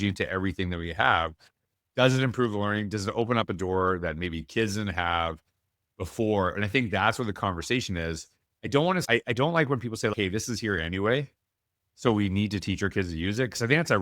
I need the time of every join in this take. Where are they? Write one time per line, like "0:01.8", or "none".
none